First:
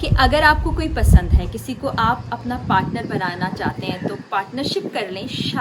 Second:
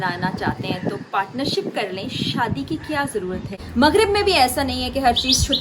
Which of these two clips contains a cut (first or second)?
second